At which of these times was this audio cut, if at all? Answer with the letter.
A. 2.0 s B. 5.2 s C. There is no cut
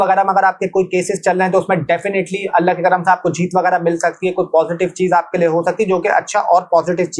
C